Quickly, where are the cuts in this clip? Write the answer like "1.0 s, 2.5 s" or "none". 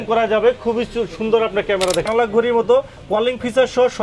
2.1 s